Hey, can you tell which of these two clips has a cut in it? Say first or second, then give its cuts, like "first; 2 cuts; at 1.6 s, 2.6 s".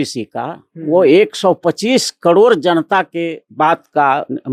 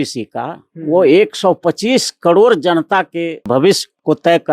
second; 1 cut; at 3.5 s